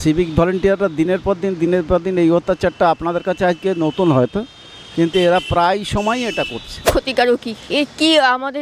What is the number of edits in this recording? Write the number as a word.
one